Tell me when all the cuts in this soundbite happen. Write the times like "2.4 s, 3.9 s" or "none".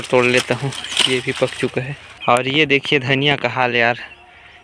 2.0 s